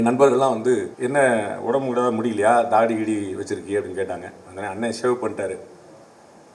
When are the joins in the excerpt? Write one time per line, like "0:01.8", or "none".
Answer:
0:00.9